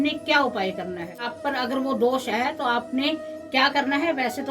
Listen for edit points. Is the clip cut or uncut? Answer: cut